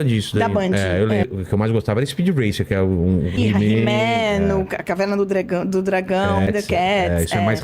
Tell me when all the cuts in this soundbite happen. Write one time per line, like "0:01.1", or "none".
0:01.3
0:03.3
0:06.5